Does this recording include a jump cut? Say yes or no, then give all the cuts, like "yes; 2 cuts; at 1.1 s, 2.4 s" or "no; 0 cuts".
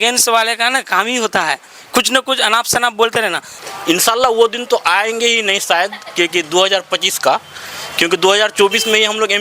yes; 1 cut; at 3.5 s